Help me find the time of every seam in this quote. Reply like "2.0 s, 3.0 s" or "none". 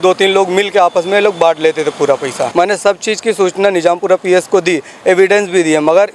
2.4 s